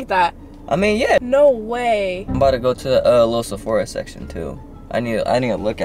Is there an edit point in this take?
yes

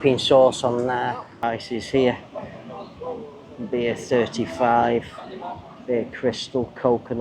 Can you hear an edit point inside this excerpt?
yes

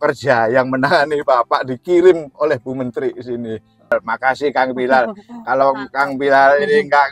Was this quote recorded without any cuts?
no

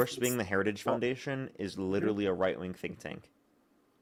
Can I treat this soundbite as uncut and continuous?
yes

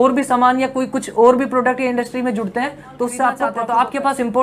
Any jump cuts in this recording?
yes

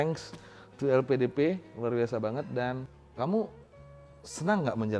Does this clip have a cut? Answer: yes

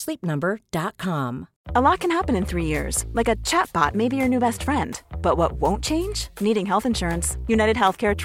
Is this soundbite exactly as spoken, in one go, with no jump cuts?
no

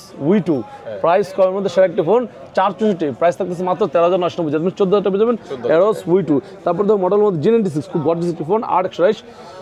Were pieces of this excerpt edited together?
no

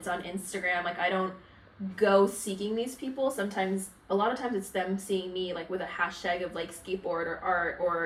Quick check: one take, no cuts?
yes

